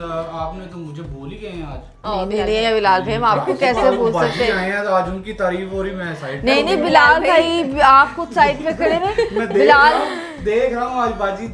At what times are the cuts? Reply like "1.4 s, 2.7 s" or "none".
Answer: none